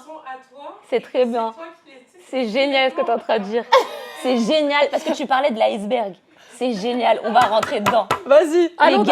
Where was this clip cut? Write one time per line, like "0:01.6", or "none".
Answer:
none